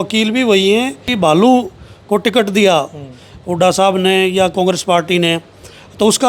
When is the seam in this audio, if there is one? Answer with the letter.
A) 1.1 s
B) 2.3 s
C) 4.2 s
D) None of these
A